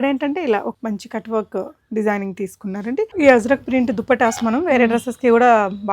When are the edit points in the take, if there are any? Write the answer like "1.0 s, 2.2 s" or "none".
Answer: 0.7 s, 3.1 s